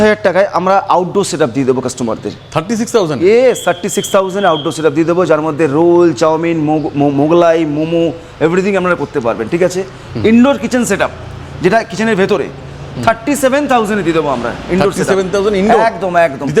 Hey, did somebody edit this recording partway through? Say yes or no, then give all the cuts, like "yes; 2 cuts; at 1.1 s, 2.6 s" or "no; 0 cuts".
no; 0 cuts